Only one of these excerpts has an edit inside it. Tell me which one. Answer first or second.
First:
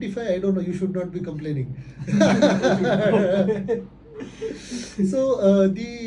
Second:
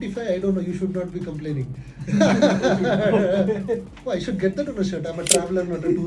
second